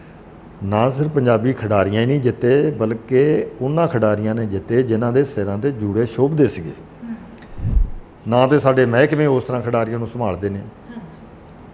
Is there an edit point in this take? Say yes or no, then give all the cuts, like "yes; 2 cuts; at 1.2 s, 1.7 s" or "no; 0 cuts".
yes; 1 cut; at 7.7 s